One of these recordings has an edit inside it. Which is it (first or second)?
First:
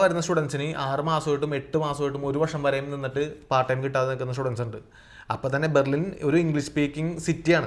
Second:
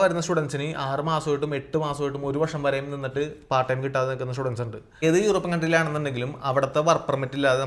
second